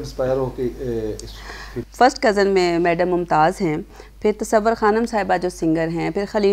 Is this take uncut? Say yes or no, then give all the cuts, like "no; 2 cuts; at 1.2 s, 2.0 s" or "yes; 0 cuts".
no; 2 cuts; at 1.8 s, 4.0 s